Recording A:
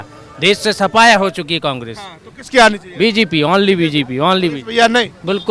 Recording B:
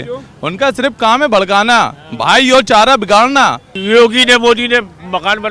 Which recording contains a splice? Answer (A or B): B